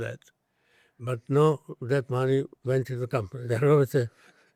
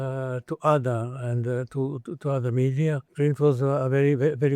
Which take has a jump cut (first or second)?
second